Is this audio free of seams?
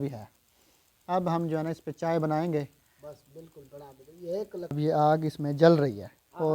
no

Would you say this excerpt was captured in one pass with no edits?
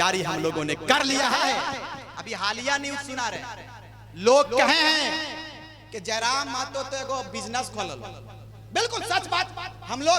no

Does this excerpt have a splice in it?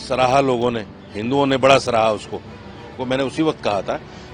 yes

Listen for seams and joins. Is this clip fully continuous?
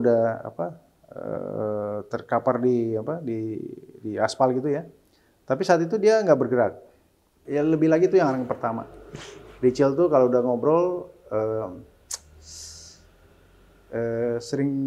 no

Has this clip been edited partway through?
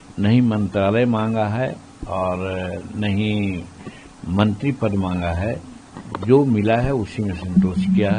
no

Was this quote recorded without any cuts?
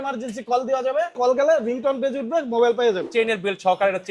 no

